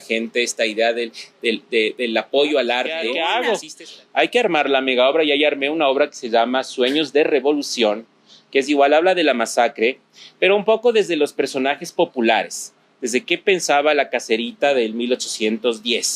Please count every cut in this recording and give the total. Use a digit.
1